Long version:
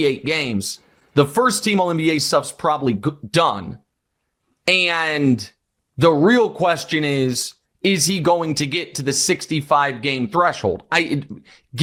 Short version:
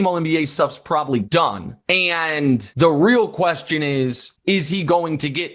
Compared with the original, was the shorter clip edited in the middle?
yes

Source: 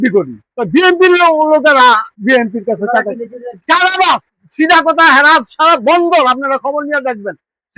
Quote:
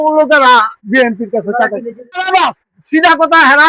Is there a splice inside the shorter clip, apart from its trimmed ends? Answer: yes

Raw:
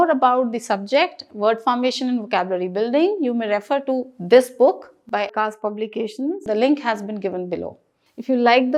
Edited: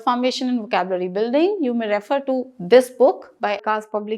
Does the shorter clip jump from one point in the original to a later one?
yes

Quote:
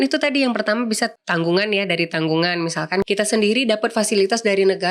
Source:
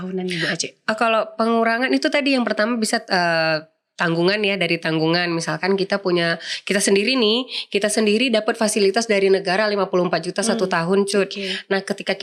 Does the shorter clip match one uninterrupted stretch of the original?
no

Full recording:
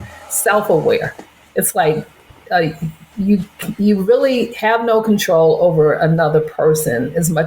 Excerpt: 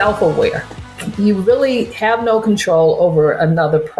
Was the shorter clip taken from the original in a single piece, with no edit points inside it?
no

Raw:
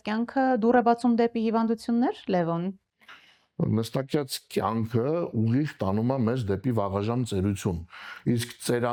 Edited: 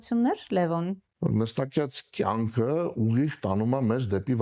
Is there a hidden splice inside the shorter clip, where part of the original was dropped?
yes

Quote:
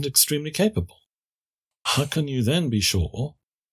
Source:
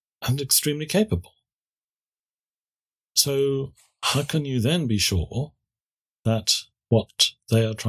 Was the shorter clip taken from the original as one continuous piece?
no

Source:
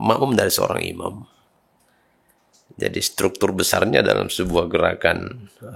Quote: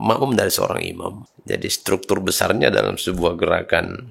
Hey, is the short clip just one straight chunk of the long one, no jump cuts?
no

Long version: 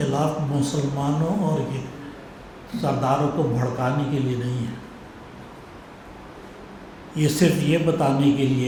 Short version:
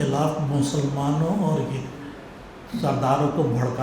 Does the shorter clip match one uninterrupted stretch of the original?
yes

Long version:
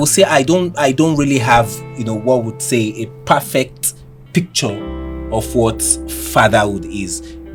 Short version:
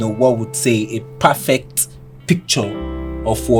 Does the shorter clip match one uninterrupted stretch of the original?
yes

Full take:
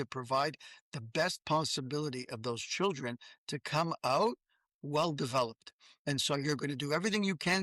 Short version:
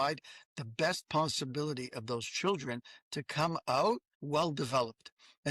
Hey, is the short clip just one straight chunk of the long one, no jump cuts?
no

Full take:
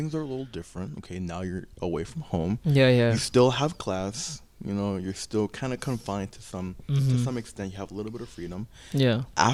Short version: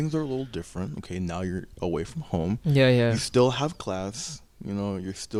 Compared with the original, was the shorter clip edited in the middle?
no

